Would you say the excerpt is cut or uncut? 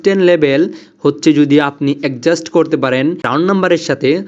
cut